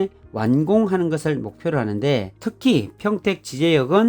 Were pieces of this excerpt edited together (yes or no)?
yes